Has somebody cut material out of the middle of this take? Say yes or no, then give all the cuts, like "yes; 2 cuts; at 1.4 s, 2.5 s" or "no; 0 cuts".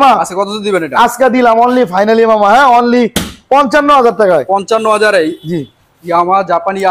no; 0 cuts